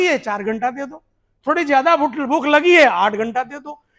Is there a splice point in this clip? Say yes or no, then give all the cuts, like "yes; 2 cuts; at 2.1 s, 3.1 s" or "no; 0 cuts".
no; 0 cuts